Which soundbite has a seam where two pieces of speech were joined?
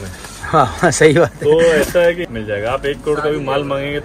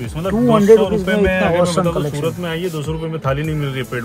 first; 1 cut; at 2.2 s

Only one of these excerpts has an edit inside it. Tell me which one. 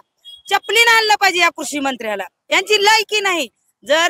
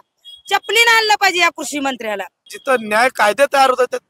second; 1 cut; at 2.4 s

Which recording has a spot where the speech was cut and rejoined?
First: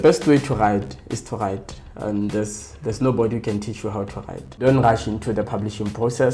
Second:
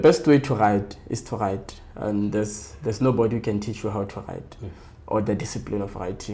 first; 1 cut; at 4.6 s

